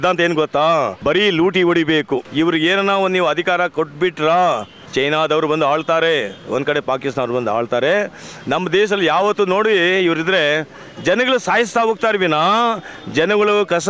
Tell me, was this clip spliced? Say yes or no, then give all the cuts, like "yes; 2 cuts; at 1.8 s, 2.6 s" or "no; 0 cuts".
yes; 3 cuts; at 0.9 s, 2.3 s, 4.8 s